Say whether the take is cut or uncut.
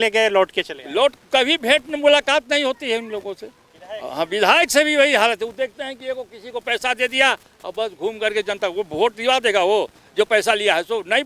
uncut